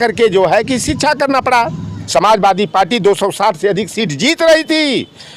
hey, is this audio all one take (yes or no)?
no